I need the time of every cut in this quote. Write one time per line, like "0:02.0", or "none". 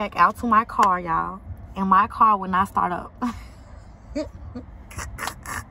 none

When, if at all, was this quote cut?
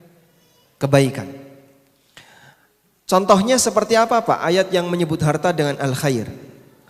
none

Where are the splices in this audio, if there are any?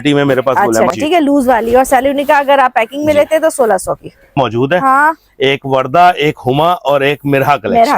0:00.9
0:04.3

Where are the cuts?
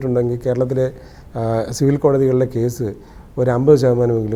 none

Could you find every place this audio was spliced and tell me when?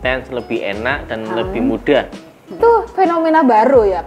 0:02.6

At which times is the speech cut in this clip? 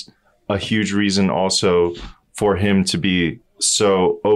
none

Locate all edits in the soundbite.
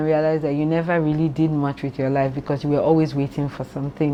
none

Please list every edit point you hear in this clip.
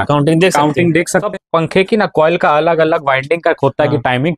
0:01.3

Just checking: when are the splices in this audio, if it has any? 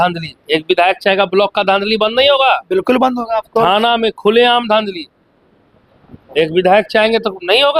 none

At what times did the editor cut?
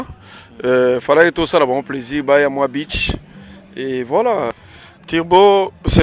0:04.5

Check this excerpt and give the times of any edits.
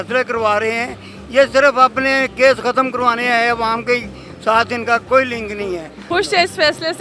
0:05.9

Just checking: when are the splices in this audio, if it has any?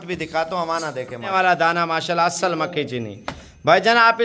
0:01.3

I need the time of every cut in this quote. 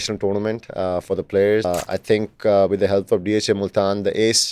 0:01.7

